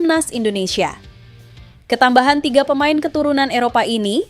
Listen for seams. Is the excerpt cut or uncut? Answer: uncut